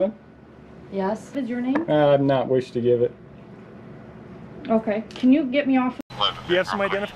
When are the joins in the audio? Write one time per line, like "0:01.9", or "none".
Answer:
0:01.3
0:06.0

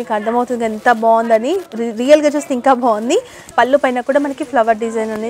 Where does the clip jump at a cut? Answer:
0:03.5

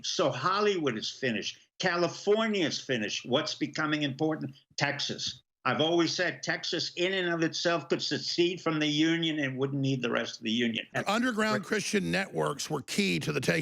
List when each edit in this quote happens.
0:10.9

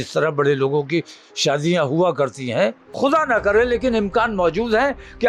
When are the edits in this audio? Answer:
0:02.9

